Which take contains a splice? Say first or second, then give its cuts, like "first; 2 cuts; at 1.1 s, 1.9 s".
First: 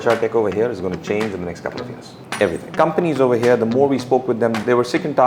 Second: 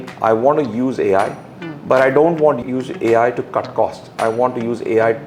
first; 1 cut; at 2.1 s